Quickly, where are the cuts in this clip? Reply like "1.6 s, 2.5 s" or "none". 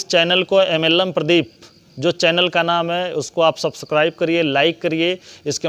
none